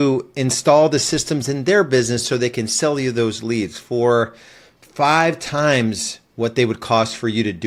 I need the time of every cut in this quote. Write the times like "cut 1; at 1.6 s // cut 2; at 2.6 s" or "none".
none